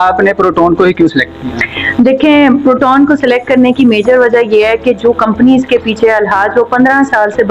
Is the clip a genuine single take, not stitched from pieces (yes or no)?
yes